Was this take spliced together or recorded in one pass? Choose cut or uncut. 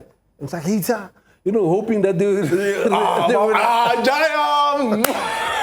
uncut